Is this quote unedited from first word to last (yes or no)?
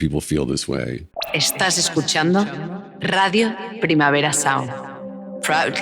no